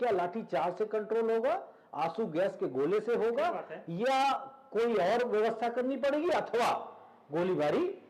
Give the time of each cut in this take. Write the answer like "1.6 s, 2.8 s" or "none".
none